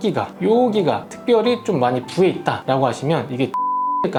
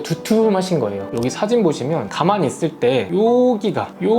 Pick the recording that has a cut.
second; 2 cuts; at 1.0 s, 2.1 s

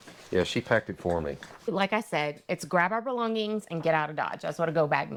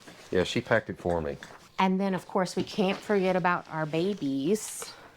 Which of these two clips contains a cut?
second; 1 cut; at 1.5 s

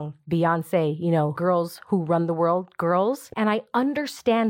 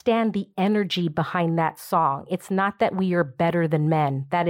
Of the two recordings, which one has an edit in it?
first; 2 cuts; at 1.4 s, 3.3 s

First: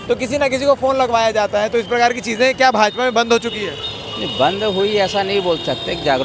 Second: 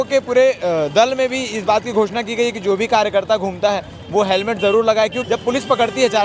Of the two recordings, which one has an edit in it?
second; 1 cut; at 5.2 s

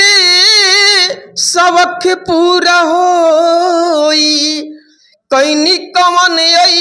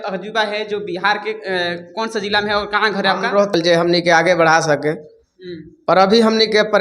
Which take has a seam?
second; 1 cut; at 3.5 s

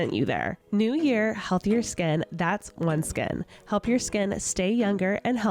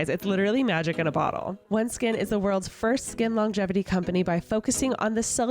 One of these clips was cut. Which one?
second; 1 cut; at 1.5 s

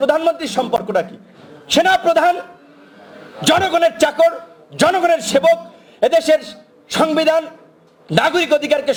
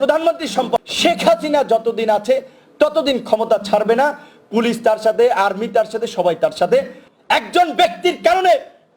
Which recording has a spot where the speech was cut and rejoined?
second; 2 cuts; at 0.9 s, 7.0 s

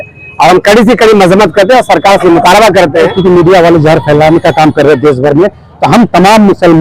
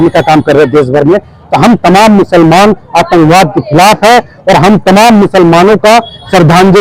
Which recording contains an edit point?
first; 1 cut; at 3.1 s

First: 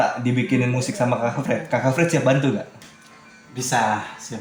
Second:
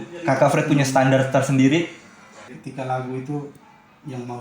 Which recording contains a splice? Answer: second; 1 cut; at 2.6 s

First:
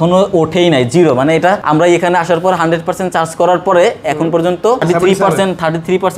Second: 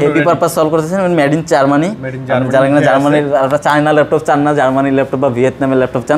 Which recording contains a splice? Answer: first; 2 cuts; at 1.6 s, 4.8 s

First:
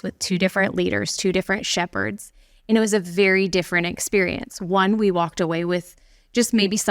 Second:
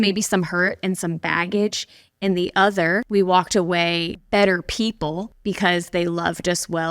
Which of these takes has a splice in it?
second; 3 cuts; at 3.1 s, 4.1 s, 5.3 s

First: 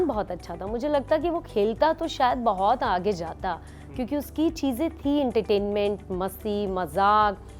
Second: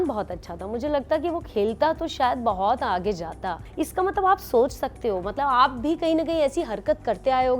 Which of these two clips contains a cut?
second; 1 cut; at 3.7 s

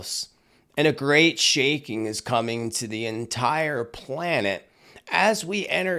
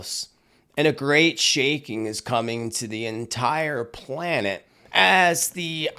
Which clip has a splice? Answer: second; 1 cut; at 4.7 s

